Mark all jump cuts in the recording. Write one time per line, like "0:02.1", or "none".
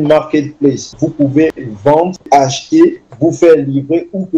0:01.0
0:02.2
0:03.1